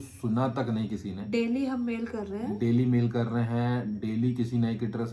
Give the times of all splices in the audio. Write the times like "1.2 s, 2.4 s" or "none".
none